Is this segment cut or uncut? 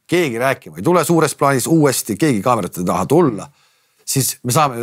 uncut